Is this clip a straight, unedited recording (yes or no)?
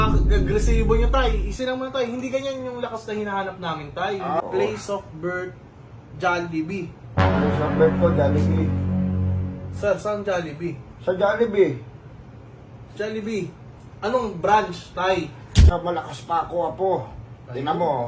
no